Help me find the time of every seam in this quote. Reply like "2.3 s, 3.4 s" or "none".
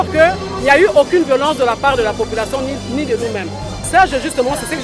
3.9 s